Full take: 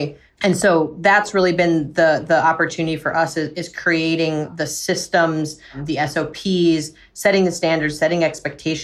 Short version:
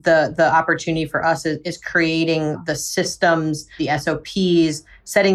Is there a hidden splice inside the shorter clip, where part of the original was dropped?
yes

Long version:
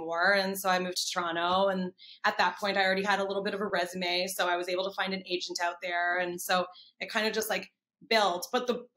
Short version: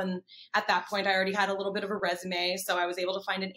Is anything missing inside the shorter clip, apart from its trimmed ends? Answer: no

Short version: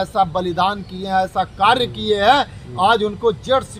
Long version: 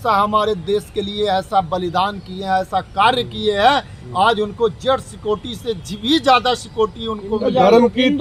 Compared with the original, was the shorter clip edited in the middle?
no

